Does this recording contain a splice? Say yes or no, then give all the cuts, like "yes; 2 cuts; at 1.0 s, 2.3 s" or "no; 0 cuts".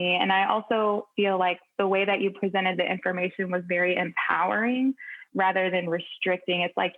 no; 0 cuts